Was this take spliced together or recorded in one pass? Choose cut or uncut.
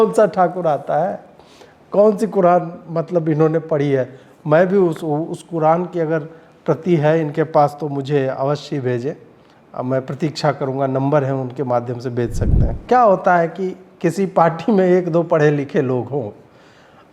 cut